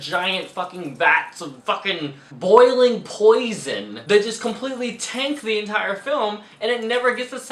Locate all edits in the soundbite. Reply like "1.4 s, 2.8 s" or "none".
none